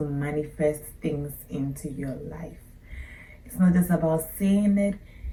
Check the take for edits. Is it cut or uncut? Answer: uncut